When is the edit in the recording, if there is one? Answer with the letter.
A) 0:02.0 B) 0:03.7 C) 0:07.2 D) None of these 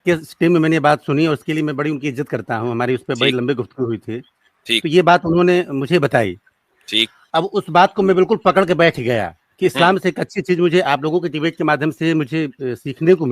C